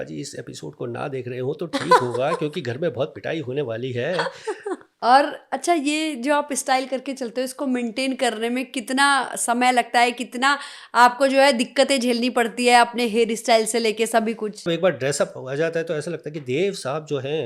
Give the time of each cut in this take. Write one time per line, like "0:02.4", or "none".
0:04.9
0:14.7